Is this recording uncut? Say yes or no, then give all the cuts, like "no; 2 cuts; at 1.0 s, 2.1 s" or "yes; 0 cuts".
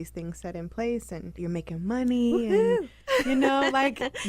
no; 1 cut; at 1.2 s